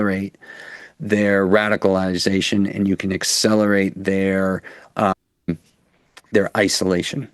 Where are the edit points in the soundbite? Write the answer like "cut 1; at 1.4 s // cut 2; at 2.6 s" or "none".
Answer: none